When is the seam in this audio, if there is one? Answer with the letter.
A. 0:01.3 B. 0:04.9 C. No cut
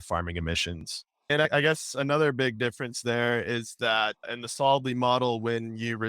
A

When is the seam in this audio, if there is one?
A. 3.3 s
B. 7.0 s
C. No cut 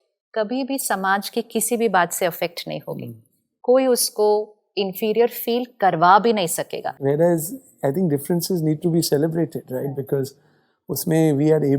B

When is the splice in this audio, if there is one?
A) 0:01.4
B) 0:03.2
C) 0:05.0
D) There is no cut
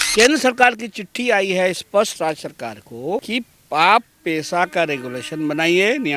B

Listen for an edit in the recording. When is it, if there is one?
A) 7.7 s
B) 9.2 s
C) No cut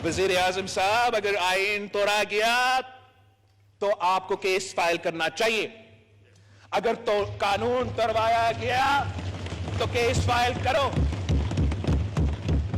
C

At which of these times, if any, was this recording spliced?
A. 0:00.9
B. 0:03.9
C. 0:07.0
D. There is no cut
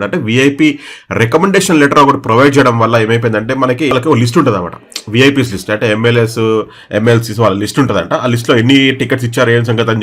B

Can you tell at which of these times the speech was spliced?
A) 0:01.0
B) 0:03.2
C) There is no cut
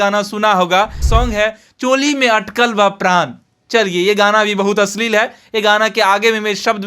A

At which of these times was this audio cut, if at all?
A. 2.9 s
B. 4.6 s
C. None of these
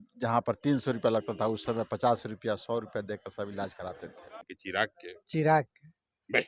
B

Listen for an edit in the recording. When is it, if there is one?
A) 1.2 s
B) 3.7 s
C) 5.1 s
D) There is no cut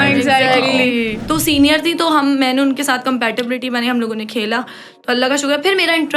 A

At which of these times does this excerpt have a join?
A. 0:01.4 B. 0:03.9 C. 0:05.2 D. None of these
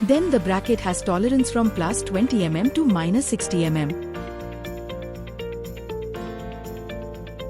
B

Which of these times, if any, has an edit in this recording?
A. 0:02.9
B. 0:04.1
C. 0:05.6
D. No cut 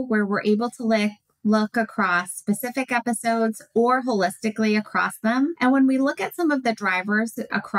C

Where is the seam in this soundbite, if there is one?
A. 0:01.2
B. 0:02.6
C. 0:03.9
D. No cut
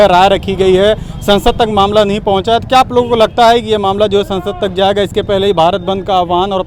D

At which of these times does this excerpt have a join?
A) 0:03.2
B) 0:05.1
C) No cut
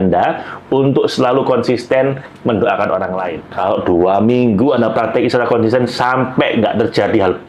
A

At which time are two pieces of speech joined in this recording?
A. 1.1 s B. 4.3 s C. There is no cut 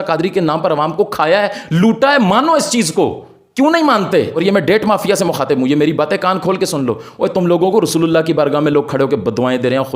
B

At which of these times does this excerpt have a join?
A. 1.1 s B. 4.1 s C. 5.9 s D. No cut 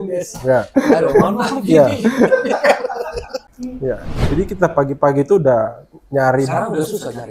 B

